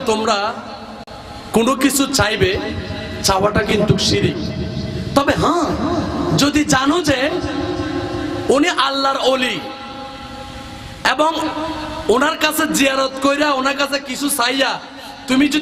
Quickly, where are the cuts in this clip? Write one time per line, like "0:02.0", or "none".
none